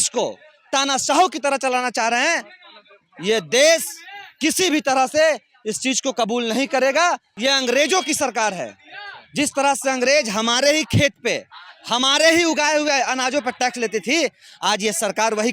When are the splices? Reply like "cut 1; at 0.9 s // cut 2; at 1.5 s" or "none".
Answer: cut 1; at 7.3 s

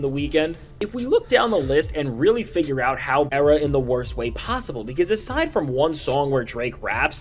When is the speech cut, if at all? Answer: cut 1; at 3.3 s

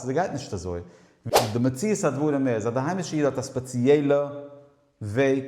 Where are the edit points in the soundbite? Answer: cut 1; at 1.2 s

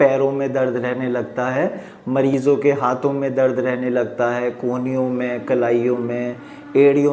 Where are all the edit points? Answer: none

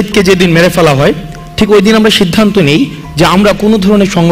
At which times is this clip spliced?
none

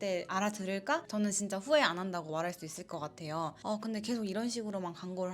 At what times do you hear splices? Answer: cut 1; at 1.0 s // cut 2; at 3.6 s

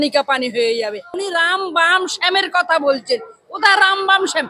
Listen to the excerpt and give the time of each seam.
cut 1; at 1.2 s

